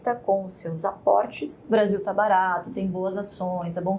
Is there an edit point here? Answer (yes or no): yes